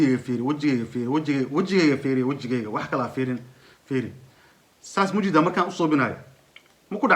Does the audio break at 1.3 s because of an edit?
no; 0 cuts

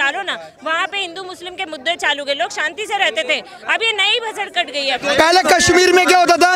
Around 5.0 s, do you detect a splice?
yes; 1 cut; at 5.0 s

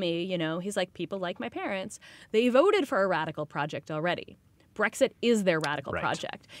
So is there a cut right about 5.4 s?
no; 1 cut; at 0.9 s

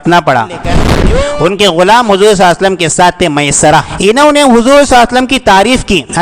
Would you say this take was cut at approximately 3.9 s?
yes; 2 cuts; at 0.9 s, 3.9 s

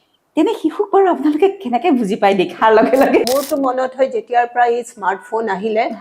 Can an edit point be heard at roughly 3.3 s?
yes; 1 cut; at 3.3 s

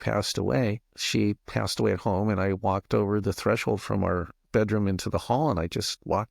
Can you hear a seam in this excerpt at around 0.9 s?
yes; 1 cut; at 0.9 s

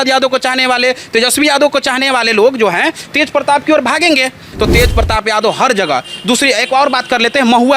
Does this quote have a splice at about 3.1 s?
no; 1 cut; at 4.5 s

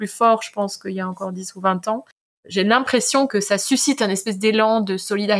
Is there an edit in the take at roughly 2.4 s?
yes; 2 cuts; at 2.4 s, 3.3 s

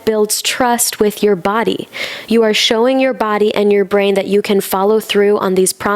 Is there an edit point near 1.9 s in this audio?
no; 0 cuts

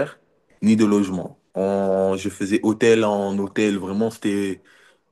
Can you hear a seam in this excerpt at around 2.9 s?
no; 1 cut; at 1.4 s

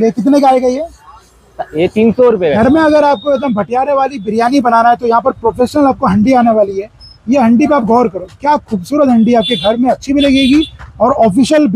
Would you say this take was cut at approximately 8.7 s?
no; 1 cut; at 2.6 s

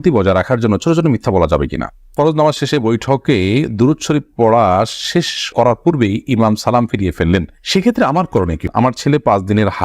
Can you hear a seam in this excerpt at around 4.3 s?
no; 2 cuts; at 2.1 s, 8.6 s

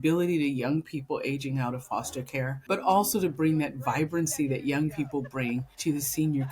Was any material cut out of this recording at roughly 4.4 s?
no; 2 cuts; at 2.6 s, 5.7 s

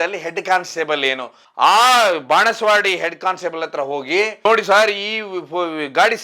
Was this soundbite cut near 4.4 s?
yes; 1 cut; at 4.4 s

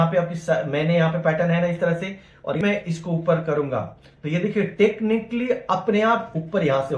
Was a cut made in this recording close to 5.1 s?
no; 1 cut; at 2.6 s

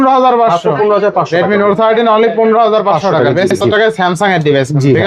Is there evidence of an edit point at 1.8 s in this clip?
no; 1 cut; at 3.6 s

